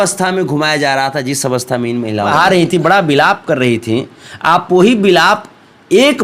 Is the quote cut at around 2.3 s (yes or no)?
yes